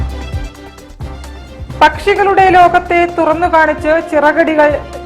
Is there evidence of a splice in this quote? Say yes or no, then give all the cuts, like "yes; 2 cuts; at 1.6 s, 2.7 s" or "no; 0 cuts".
yes; 1 cut; at 1.2 s